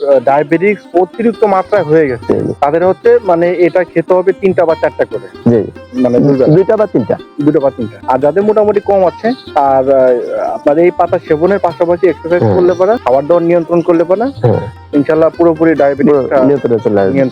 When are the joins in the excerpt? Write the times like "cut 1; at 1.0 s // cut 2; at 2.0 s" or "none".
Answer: cut 1; at 2.5 s // cut 2; at 7.9 s // cut 3; at 9.4 s // cut 4; at 13.0 s